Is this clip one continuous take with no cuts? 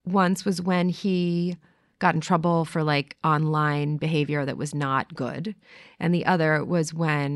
yes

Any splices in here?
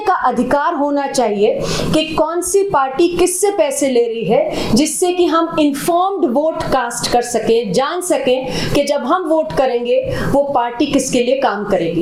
no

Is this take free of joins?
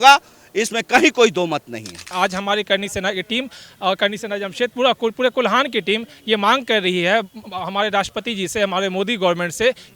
no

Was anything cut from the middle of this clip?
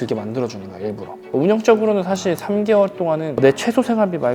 yes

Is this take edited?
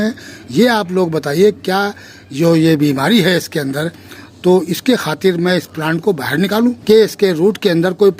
yes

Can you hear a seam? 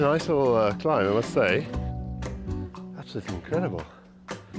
no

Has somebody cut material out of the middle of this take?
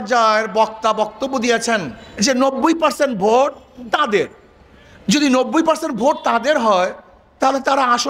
yes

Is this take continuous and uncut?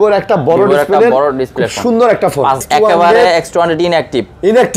no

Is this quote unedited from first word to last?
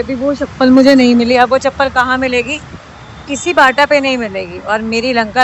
yes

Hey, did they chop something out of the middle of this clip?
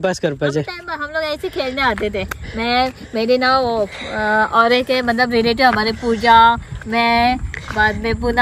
no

